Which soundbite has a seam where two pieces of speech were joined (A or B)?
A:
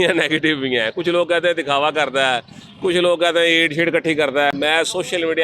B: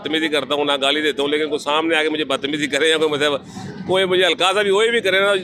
A